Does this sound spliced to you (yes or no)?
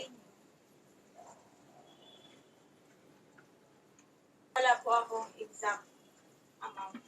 yes